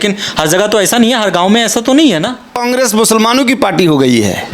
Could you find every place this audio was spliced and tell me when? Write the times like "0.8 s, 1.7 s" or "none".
2.6 s

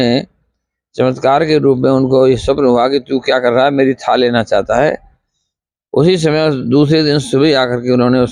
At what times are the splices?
none

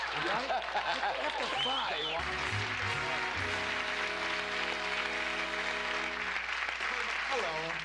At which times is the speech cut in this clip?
none

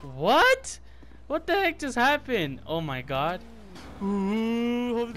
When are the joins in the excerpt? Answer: 3.7 s

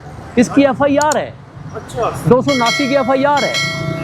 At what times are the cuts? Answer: none

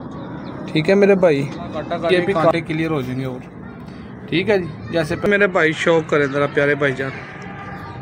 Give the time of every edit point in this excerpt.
2.0 s, 5.3 s

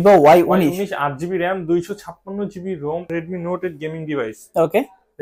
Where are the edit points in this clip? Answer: 3.1 s

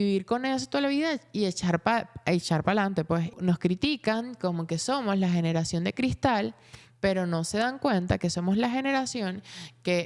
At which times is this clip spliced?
3.3 s

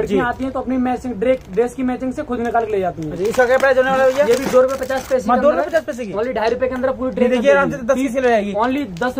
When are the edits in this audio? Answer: none

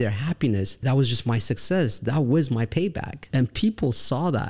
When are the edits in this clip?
0.8 s, 3.1 s

